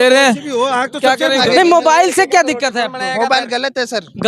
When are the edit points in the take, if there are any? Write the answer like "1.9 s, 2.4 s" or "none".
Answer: 1.4 s